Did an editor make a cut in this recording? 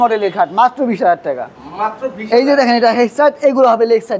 no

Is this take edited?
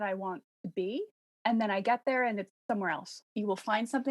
yes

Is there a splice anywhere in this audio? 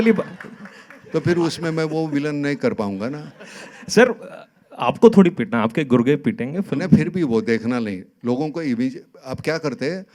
no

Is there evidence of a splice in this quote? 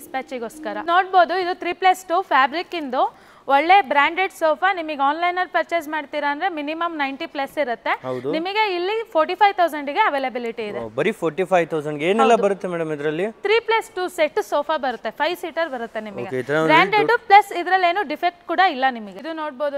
no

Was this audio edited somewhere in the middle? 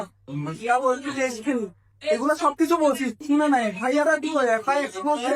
no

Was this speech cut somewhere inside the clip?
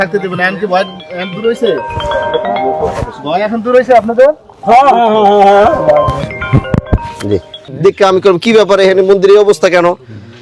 yes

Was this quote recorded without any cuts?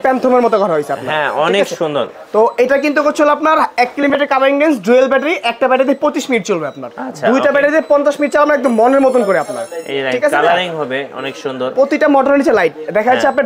yes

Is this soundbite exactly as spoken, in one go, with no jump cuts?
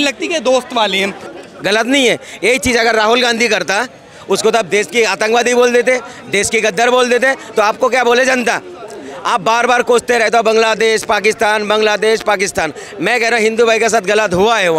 no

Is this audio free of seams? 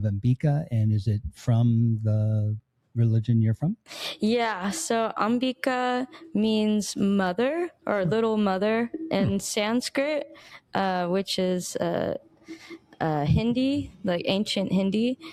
yes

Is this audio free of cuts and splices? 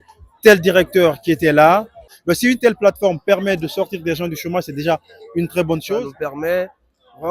no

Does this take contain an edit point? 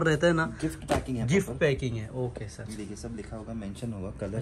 no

